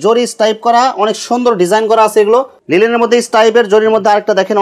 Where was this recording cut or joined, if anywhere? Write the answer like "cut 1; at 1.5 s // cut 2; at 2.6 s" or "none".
cut 1; at 2.5 s